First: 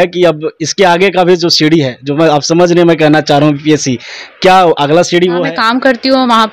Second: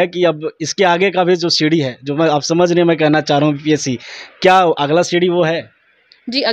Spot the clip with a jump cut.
first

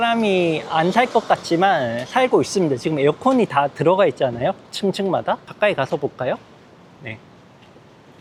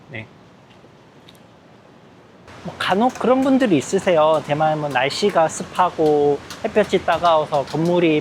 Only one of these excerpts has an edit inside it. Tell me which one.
second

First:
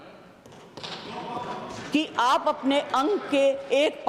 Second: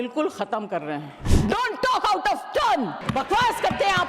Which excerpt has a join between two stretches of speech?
second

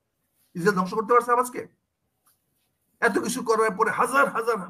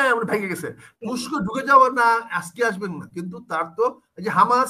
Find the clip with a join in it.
second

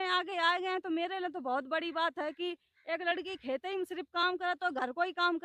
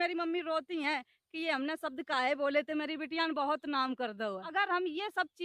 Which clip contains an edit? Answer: second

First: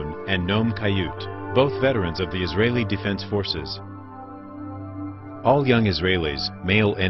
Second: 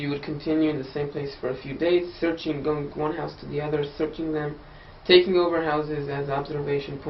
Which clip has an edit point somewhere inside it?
second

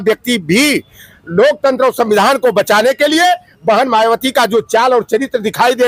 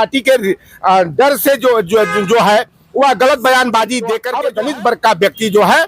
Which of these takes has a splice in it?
second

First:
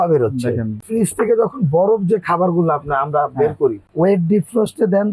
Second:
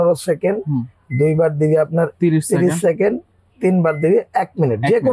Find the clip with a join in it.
first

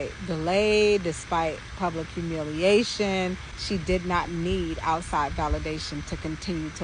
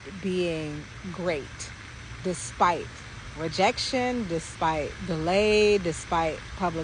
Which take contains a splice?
first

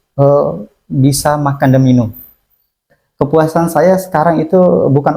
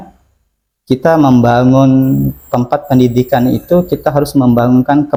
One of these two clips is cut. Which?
first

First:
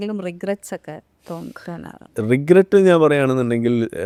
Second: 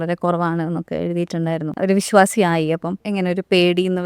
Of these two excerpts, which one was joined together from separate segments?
second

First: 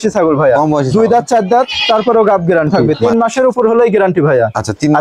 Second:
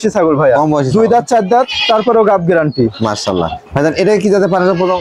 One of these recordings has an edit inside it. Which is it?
first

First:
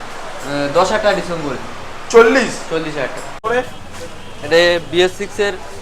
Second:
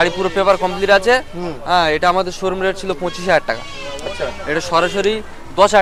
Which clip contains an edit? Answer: first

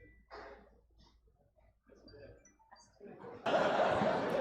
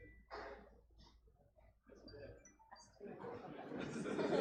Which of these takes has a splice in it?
first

